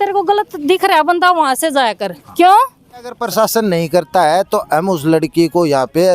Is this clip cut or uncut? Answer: cut